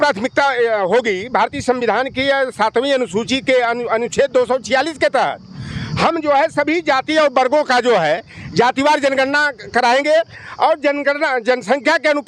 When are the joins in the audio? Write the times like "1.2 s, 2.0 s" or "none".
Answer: none